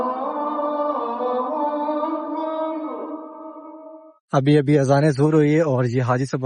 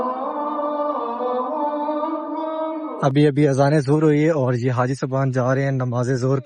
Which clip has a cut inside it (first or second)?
second